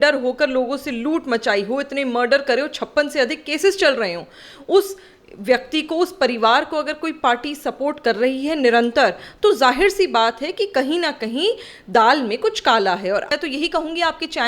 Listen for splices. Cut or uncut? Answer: cut